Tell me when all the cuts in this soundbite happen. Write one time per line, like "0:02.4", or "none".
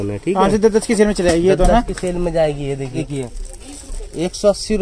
0:03.0